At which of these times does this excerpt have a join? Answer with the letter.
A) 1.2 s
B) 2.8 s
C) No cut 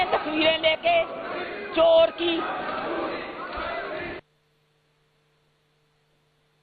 C